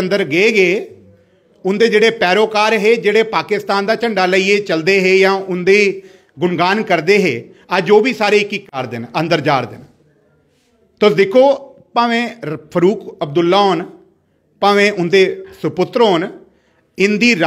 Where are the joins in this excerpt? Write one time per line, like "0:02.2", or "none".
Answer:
0:08.7